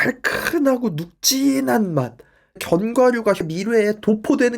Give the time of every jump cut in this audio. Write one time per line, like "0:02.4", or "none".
0:02.6
0:03.5